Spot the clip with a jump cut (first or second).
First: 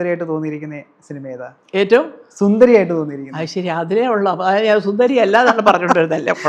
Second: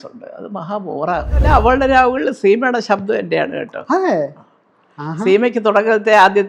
second